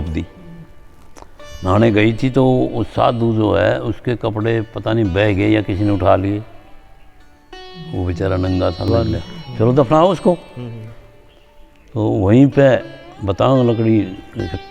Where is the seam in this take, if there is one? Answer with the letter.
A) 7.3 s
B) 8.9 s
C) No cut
B